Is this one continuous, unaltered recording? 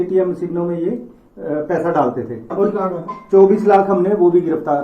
no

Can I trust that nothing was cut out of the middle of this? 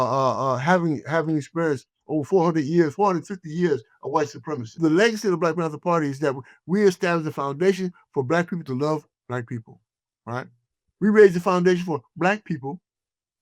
no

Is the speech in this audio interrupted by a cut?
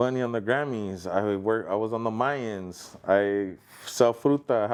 no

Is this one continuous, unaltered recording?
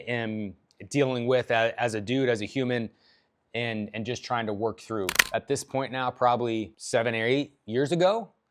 no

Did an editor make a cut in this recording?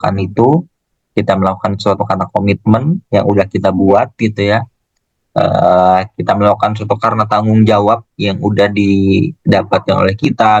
no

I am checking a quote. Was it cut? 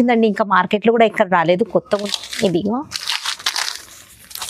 yes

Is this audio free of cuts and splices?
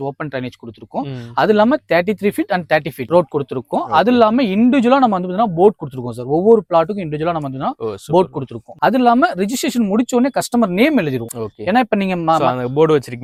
yes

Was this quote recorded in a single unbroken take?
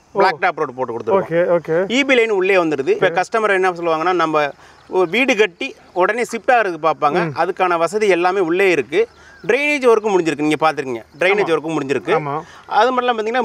no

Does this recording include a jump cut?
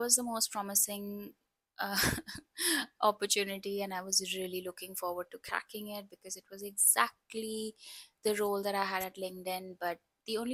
no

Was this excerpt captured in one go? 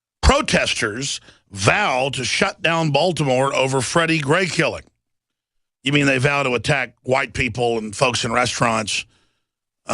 no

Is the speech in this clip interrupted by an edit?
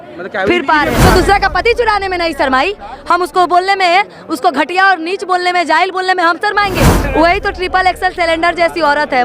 yes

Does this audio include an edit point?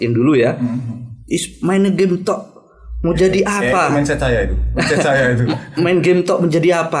no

